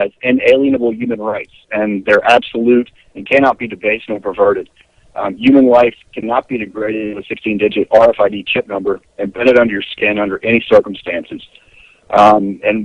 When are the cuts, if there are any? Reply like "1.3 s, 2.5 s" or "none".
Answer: none